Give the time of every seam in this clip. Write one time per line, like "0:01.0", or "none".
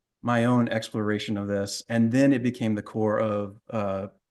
none

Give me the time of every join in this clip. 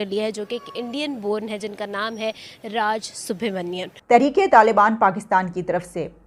0:03.9

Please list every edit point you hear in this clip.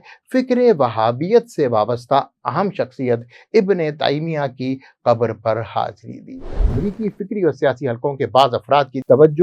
0:06.7

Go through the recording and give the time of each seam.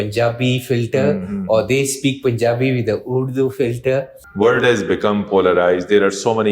0:04.2

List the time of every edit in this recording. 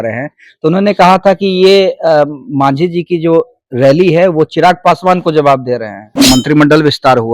0:06.1

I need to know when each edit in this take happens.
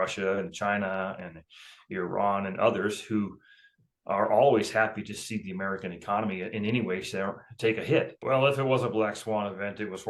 0:08.2

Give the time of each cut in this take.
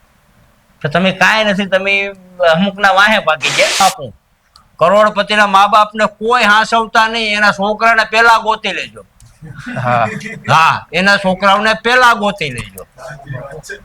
0:03.8

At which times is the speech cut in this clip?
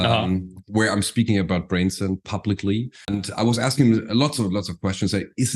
0:03.1

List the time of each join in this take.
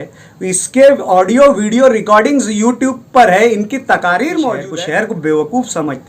0:04.7

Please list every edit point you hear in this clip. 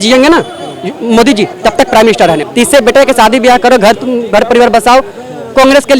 0:02.4

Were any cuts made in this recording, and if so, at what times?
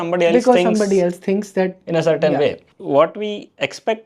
0:02.7

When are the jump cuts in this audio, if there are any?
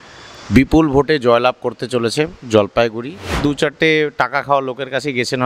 0:03.4

